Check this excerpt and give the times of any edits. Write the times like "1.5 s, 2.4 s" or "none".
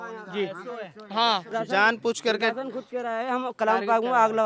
1.5 s